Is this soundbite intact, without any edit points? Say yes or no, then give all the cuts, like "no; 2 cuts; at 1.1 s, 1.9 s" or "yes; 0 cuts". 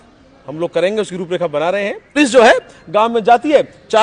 no; 1 cut; at 2.2 s